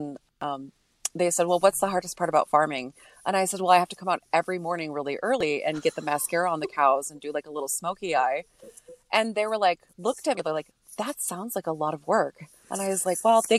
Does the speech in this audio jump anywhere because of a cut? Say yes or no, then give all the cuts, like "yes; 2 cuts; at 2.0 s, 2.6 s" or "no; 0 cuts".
no; 0 cuts